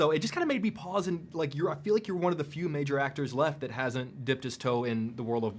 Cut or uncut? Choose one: uncut